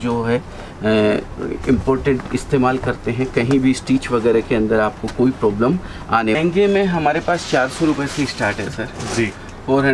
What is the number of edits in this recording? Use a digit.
1